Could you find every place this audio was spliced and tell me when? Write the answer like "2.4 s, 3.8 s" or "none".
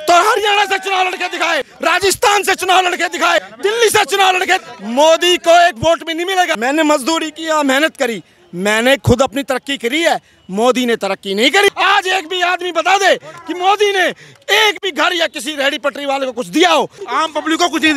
1.7 s, 3.5 s, 4.6 s, 6.5 s, 11.7 s, 17.0 s